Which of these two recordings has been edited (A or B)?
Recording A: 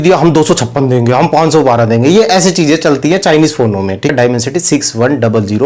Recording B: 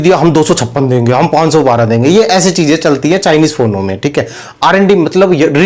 A